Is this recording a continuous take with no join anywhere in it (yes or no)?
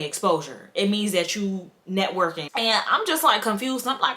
no